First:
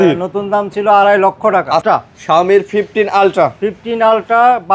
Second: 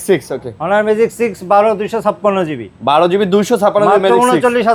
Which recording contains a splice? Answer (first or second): first